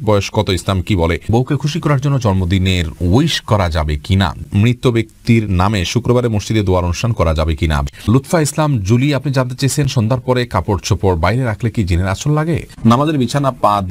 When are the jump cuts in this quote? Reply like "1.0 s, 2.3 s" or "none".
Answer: 1.3 s, 4.4 s, 7.9 s, 12.7 s